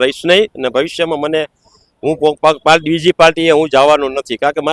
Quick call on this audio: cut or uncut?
uncut